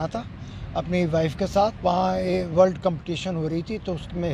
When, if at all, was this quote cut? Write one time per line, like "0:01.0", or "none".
0:01.8